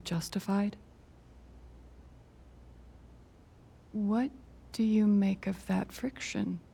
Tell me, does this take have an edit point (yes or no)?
no